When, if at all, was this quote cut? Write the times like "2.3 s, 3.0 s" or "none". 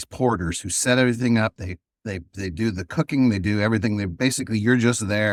none